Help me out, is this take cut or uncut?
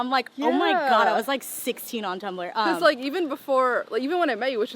uncut